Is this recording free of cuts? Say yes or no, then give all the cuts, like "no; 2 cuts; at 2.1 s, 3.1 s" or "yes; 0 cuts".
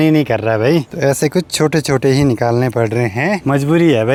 yes; 0 cuts